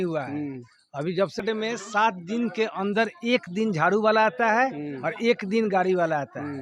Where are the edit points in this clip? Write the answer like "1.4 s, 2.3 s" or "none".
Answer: 1.4 s